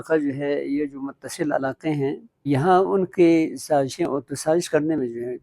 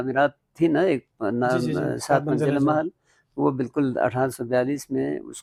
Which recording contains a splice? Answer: first; 1 cut; at 2.5 s

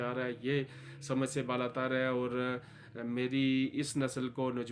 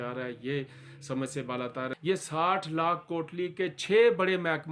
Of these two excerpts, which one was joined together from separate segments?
second; 1 cut; at 1.9 s

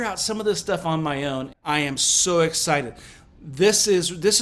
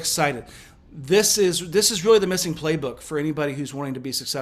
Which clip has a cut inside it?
first; 1 cut; at 1.5 s

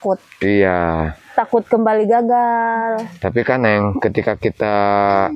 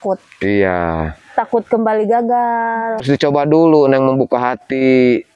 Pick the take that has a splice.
second; 1 cut; at 3.0 s

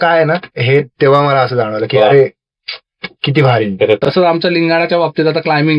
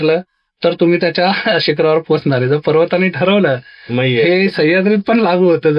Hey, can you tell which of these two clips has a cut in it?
first; 1 cut; at 4.0 s

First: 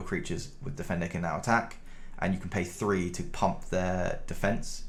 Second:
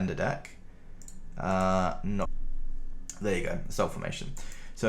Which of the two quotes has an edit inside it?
second; 1 cut; at 2.3 s

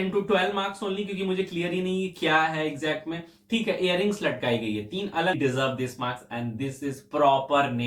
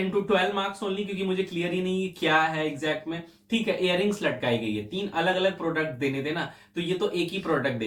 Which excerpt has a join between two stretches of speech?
first; 1 cut; at 5.3 s

